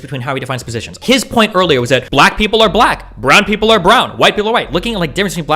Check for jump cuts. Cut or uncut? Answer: cut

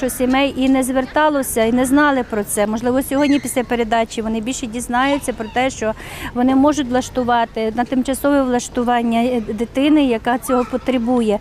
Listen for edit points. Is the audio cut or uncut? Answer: uncut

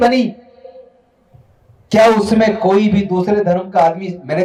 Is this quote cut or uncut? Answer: uncut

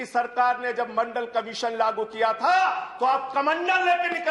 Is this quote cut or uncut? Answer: uncut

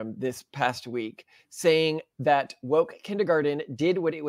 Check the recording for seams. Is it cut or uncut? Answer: uncut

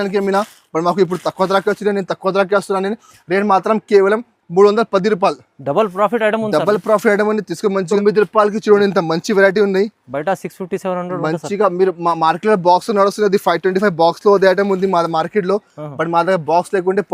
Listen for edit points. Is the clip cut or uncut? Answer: cut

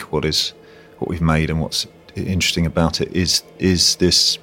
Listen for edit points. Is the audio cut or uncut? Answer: uncut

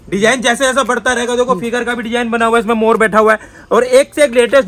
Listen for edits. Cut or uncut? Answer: uncut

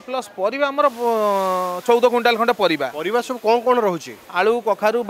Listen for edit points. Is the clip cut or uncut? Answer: uncut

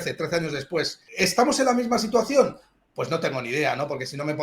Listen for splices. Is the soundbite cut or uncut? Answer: cut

